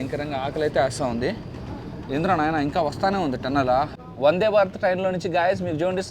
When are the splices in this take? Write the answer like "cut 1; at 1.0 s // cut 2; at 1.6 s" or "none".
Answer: cut 1; at 3.9 s